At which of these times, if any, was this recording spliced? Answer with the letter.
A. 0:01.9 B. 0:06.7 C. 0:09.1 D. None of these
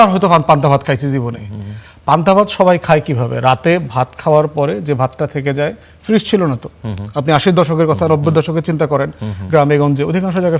D